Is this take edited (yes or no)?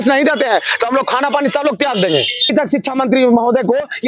yes